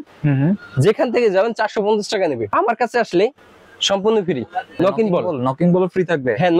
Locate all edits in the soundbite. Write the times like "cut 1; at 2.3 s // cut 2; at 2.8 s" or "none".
cut 1; at 2.5 s // cut 2; at 4.7 s